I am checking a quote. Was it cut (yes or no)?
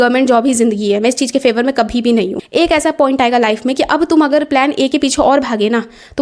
yes